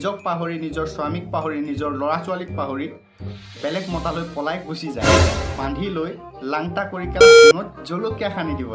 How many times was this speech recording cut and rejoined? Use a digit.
1